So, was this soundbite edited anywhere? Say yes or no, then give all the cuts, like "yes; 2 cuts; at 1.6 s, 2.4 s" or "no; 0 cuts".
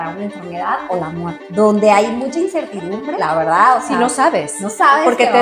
yes; 2 cuts; at 1.4 s, 3.1 s